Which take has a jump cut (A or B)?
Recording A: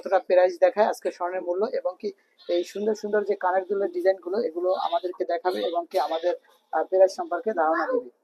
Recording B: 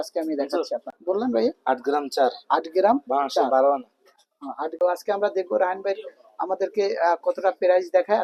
B